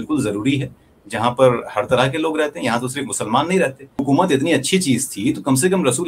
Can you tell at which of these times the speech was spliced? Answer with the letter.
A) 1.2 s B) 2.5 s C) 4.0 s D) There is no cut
C